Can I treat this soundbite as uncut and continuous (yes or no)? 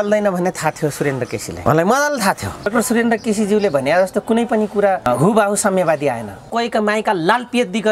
no